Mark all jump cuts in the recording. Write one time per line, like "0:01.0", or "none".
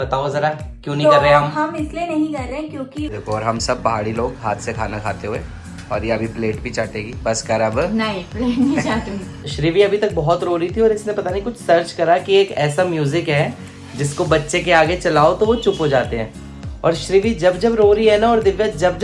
0:03.2
0:09.4